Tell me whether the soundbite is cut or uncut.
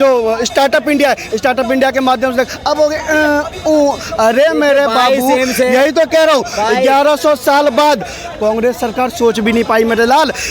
uncut